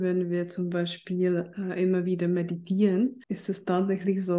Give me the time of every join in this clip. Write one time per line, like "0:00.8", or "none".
0:03.3